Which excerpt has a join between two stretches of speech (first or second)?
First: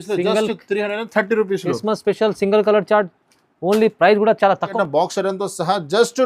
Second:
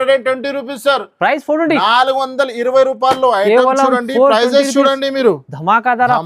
first